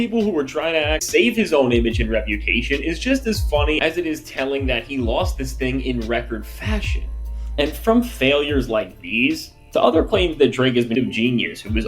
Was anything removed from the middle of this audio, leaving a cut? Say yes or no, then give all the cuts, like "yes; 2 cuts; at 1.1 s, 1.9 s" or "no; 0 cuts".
yes; 2 cuts; at 1.0 s, 11.0 s